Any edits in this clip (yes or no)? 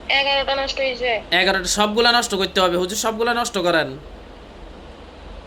no